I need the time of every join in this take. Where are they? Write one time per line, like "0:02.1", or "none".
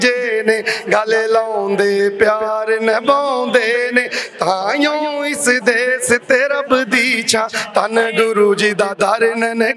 none